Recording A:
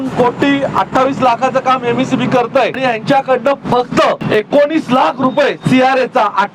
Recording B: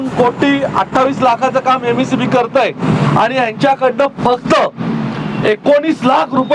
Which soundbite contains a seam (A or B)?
A